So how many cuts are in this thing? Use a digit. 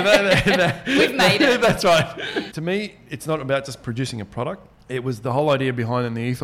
1